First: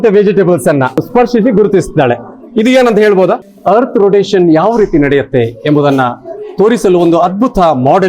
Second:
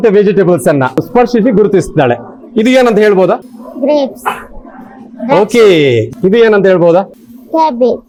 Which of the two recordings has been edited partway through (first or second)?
first